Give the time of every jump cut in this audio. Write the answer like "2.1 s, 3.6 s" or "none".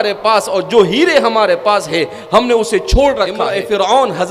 3.2 s